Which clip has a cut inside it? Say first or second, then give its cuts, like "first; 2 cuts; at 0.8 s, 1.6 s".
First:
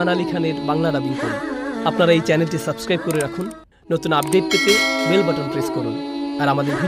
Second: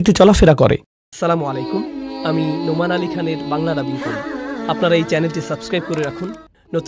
second; 1 cut; at 1.1 s